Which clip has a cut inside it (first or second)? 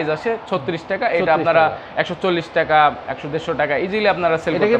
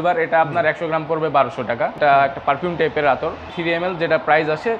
second